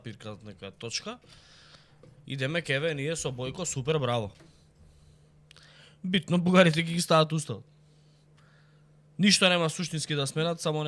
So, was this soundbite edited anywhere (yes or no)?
no